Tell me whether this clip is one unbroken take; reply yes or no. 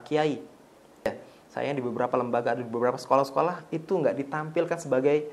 no